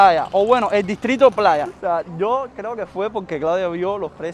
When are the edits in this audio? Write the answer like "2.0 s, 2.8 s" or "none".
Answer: 1.6 s